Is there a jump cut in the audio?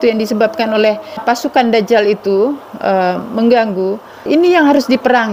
yes; 2 cuts; at 1.2 s, 4.2 s

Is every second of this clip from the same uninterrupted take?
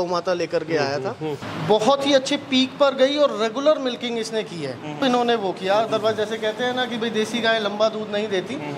no; 2 cuts; at 1.5 s, 5.0 s

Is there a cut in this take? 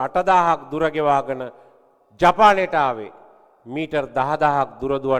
no; 0 cuts

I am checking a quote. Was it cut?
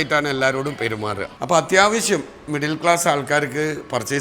yes; 1 cut; at 1.3 s

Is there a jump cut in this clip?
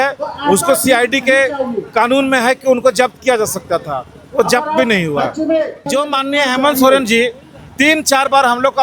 yes; 1 cut; at 5.9 s

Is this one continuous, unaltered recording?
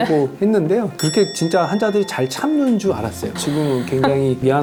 yes; 0 cuts

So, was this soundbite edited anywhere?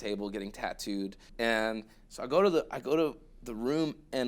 yes; 1 cut; at 1.2 s

